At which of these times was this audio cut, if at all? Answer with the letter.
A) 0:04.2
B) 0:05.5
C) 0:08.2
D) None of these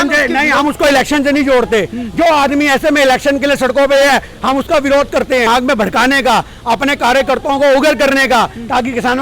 B